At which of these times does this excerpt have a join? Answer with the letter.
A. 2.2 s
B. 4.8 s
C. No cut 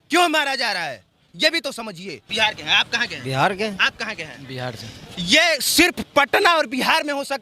A